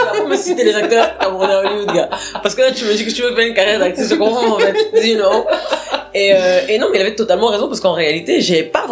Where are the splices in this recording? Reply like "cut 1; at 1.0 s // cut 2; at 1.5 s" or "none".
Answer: none